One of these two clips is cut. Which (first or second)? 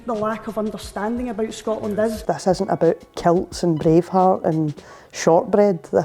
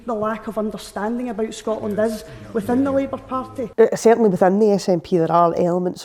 first